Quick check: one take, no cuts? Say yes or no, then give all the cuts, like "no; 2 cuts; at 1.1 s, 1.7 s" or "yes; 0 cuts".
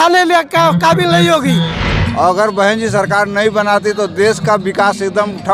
no; 1 cut; at 2.0 s